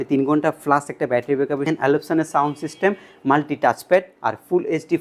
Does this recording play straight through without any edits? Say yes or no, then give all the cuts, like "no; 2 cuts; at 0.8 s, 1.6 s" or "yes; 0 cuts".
no; 1 cut; at 1.6 s